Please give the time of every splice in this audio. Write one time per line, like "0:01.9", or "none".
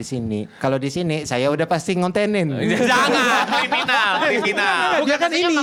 none